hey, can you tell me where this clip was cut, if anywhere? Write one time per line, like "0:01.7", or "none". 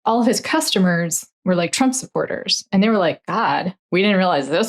0:03.8